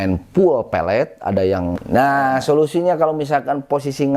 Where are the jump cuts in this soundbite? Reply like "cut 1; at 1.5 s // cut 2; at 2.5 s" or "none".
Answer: cut 1; at 1.8 s